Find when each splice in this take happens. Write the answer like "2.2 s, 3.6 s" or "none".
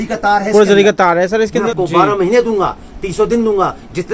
1.7 s